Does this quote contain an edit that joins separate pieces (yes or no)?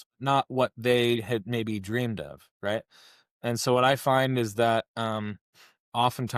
no